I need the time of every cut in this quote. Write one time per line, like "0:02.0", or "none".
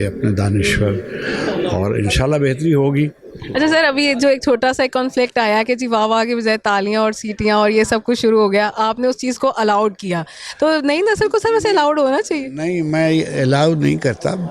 none